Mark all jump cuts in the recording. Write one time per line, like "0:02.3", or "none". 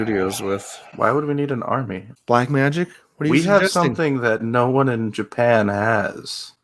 0:02.1